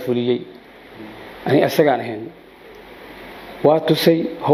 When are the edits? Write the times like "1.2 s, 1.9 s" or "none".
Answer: none